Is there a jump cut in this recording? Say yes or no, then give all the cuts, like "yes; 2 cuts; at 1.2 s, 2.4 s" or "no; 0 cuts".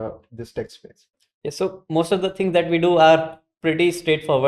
no; 0 cuts